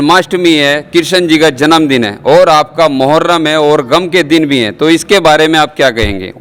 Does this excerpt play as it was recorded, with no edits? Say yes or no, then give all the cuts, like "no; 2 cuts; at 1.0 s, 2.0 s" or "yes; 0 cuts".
yes; 0 cuts